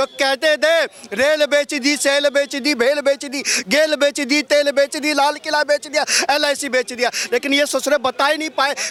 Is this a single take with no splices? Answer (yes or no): yes